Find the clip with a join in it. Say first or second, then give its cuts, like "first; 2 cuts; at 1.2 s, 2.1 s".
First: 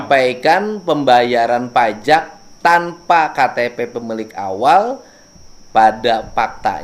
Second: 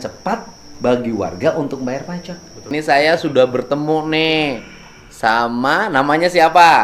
second; 1 cut; at 2.6 s